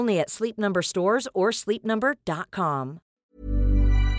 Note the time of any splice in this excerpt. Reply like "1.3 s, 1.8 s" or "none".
3.2 s